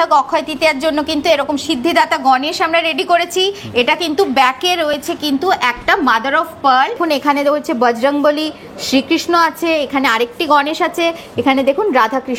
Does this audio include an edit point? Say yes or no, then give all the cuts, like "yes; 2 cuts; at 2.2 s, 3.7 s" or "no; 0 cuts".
yes; 1 cut; at 7.0 s